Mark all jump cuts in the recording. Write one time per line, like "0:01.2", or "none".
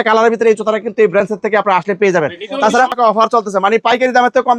0:02.9